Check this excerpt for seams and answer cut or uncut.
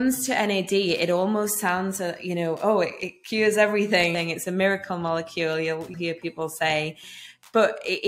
cut